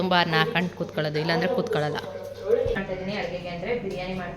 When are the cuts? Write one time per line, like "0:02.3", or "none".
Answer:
0:02.8